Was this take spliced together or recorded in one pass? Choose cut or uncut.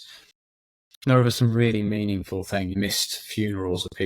cut